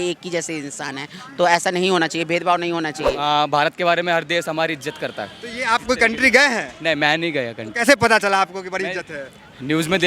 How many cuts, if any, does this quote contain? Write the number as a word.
one